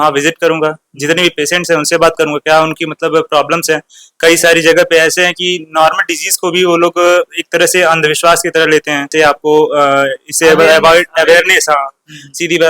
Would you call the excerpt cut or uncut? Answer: cut